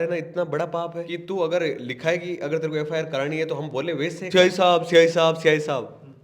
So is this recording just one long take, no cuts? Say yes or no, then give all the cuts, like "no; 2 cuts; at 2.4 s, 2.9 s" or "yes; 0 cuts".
no; 2 cuts; at 1.1 s, 4.2 s